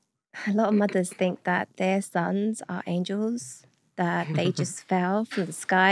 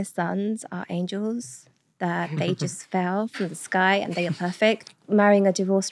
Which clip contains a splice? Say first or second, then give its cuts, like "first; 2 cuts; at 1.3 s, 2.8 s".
second; 1 cut; at 4.9 s